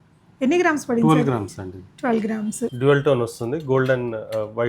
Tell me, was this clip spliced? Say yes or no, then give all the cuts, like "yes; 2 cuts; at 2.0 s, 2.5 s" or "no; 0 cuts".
yes; 1 cut; at 2.7 s